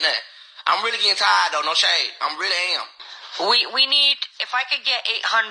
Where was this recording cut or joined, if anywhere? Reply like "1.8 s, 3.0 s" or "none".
none